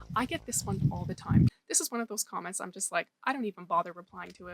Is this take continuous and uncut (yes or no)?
no